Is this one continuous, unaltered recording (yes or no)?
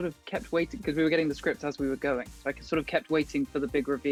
yes